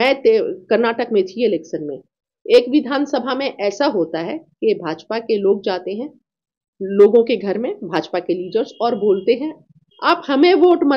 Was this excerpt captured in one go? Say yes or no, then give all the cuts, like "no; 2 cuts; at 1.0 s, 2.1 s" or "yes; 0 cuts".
yes; 0 cuts